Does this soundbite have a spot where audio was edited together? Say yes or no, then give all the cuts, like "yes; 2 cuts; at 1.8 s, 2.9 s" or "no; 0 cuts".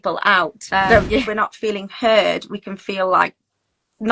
yes; 1 cut; at 1.3 s